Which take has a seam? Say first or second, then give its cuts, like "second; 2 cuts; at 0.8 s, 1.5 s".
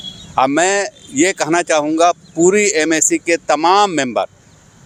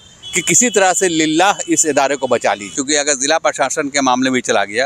second; 1 cut; at 2.8 s